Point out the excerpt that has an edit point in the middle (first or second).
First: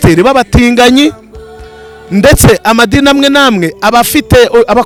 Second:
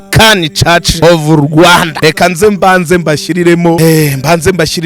second